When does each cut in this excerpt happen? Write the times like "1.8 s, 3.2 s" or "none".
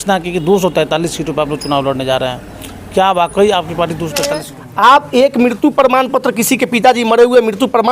4.6 s